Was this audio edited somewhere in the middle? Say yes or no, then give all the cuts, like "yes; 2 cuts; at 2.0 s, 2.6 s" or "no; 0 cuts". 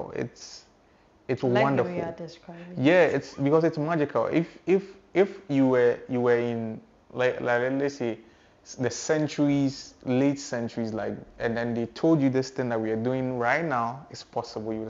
no; 0 cuts